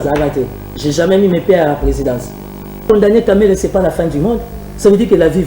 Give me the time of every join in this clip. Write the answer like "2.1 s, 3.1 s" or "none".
2.8 s